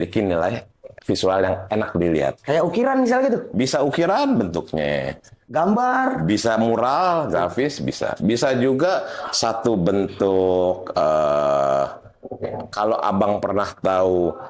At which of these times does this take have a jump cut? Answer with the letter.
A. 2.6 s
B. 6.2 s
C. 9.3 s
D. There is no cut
D